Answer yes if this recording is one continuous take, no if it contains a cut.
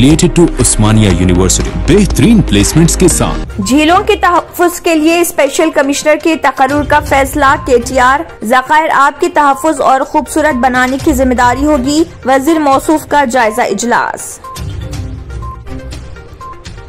no